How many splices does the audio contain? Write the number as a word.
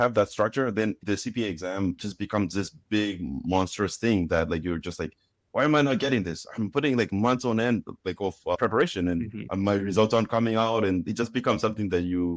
two